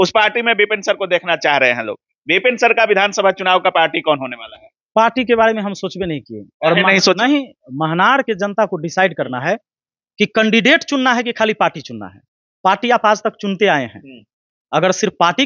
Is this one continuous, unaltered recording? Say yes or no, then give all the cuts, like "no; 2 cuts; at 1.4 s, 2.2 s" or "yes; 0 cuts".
yes; 0 cuts